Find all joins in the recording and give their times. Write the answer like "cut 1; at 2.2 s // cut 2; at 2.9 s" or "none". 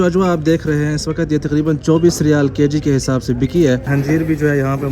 cut 1; at 3.9 s